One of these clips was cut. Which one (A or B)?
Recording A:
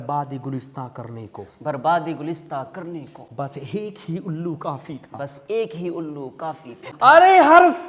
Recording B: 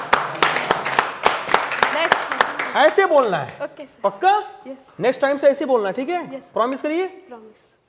A